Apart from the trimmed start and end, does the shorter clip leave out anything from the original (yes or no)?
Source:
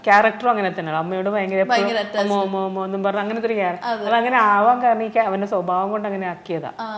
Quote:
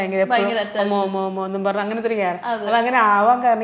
no